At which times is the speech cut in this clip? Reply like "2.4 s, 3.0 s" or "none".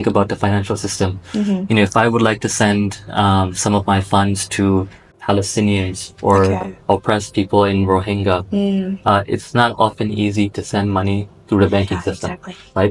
5.1 s